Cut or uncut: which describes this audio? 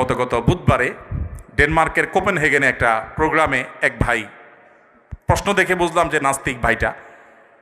uncut